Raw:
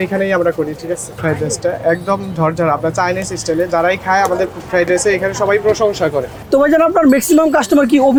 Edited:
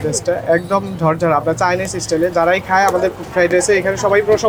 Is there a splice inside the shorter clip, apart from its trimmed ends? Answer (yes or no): no